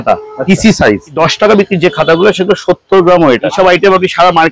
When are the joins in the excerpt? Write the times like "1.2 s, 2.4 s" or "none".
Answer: 1.1 s, 3.5 s